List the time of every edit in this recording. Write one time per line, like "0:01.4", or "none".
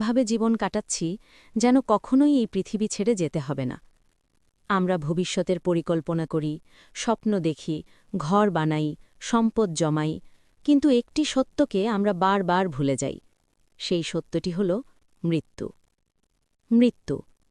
none